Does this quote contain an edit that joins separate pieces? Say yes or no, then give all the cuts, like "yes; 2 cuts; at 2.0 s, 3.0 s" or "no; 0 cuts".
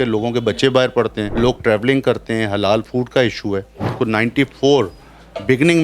yes; 2 cuts; at 1.2 s, 3.9 s